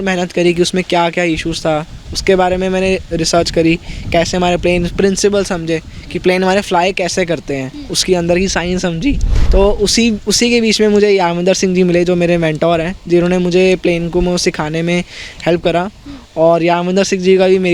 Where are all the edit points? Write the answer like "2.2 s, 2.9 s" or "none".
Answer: 9.3 s